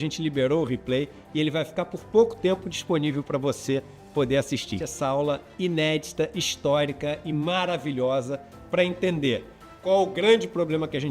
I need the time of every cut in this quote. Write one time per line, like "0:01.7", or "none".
0:04.8